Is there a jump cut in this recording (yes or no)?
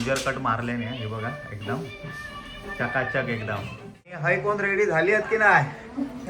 yes